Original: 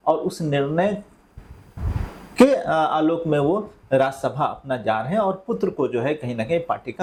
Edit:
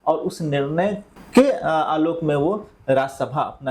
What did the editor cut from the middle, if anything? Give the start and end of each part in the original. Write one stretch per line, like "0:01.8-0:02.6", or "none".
0:01.1-0:02.2